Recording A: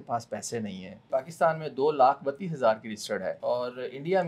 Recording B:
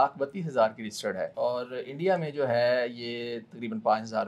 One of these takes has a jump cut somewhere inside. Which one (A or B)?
A